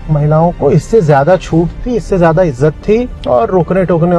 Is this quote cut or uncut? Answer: cut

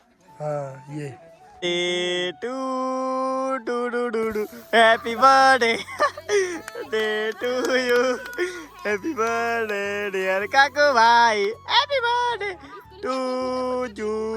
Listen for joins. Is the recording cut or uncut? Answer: cut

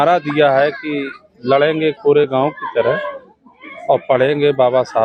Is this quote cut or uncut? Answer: uncut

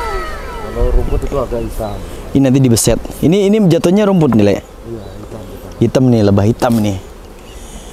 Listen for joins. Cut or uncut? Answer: uncut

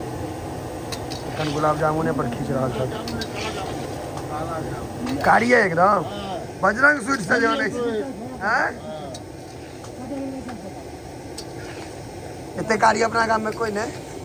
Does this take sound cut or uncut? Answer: uncut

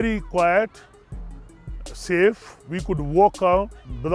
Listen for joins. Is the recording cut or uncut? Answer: uncut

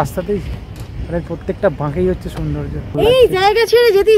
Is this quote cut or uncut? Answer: cut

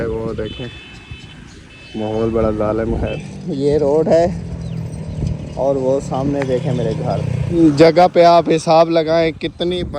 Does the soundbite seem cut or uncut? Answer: cut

